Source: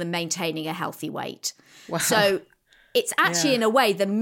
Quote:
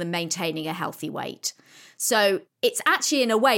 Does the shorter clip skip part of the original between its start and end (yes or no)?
yes